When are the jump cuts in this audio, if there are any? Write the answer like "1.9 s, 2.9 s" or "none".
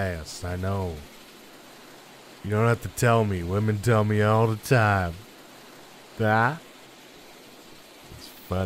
none